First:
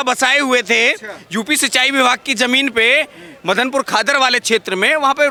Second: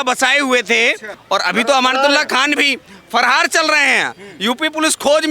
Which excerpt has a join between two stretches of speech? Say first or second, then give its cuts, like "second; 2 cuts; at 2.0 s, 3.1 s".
second; 1 cut; at 1.1 s